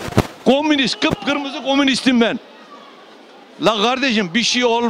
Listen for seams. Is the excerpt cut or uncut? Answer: uncut